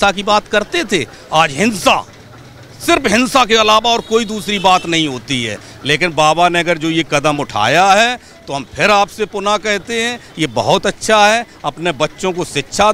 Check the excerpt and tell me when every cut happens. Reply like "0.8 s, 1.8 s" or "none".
none